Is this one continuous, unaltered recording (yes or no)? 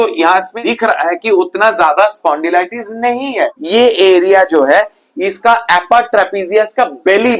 no